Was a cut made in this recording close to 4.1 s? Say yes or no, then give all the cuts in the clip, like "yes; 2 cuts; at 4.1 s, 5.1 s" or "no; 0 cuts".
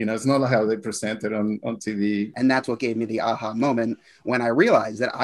no; 1 cut; at 2.3 s